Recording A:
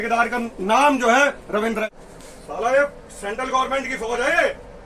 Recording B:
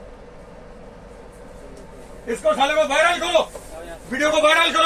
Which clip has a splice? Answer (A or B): A